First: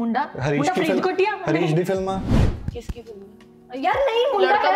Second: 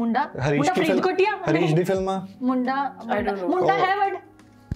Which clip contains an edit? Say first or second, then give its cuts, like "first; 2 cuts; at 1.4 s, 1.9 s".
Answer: first; 1 cut; at 2.3 s